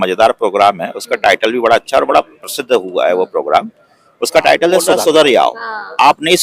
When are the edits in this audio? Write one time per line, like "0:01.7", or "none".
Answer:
0:04.9